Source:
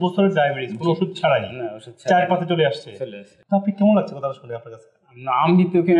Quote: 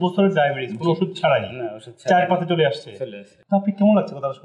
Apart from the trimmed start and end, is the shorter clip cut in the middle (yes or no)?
no